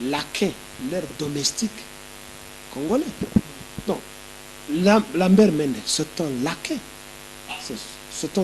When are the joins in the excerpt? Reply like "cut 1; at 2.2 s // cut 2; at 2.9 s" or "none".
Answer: none